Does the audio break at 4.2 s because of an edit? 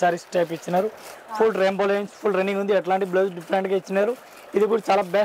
no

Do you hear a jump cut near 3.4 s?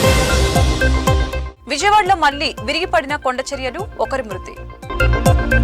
no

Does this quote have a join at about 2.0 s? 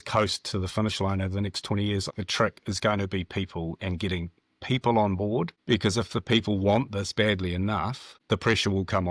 yes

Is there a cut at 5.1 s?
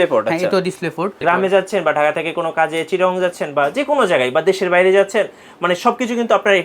no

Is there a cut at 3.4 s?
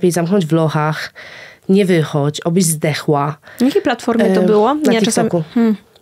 no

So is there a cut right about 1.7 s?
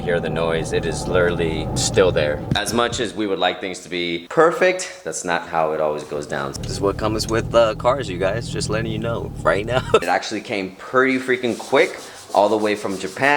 yes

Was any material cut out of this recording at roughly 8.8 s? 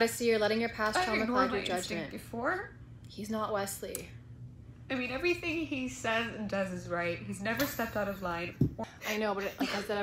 yes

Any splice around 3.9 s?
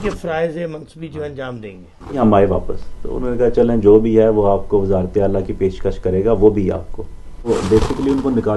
no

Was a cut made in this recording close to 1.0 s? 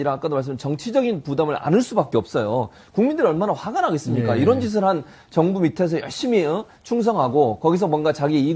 yes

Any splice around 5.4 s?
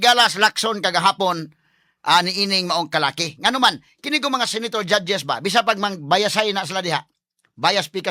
no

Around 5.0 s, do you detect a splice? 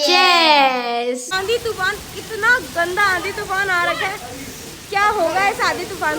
no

